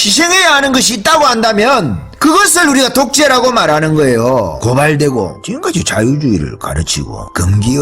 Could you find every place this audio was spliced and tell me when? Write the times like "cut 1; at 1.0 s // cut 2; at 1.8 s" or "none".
cut 1; at 4.6 s // cut 2; at 5.4 s